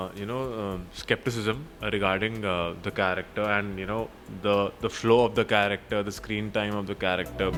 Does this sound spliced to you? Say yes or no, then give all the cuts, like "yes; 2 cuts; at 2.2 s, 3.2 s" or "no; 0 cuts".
no; 0 cuts